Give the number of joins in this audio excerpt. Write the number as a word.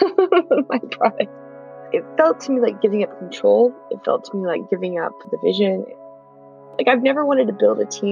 two